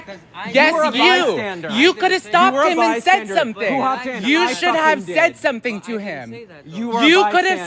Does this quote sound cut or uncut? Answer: cut